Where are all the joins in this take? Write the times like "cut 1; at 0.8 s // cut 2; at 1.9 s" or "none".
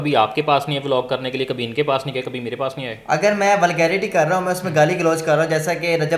none

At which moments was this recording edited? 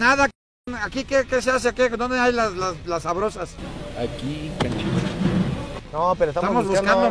cut 1; at 5.7 s

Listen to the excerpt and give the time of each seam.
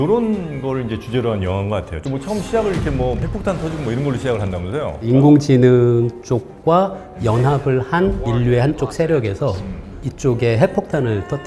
cut 1; at 1.9 s // cut 2; at 5.1 s

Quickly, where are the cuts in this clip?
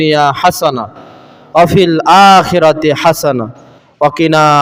none

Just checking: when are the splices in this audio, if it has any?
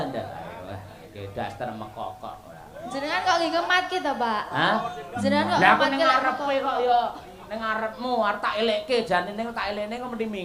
none

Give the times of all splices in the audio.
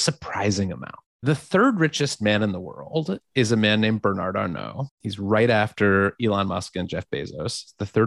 none

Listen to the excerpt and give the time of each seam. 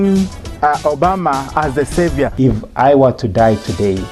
cut 1; at 2.3 s

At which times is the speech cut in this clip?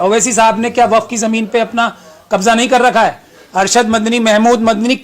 none

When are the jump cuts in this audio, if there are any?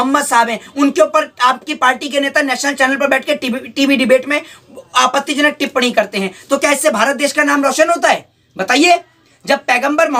none

